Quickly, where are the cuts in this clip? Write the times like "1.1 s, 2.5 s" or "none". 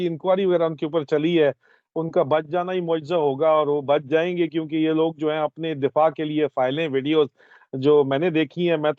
none